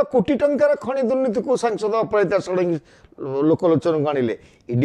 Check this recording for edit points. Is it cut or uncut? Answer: uncut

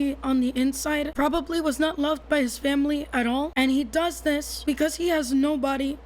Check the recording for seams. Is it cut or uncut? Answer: cut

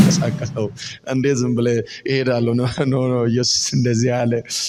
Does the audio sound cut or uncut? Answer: uncut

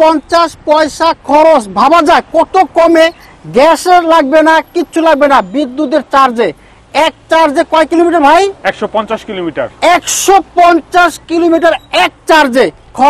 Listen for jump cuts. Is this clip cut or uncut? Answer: uncut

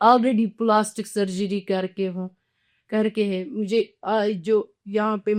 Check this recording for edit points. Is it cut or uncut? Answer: uncut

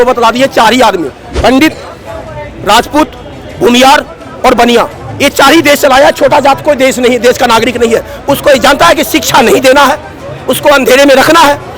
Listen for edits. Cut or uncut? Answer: cut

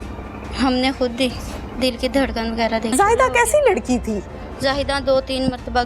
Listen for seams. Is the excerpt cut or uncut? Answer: cut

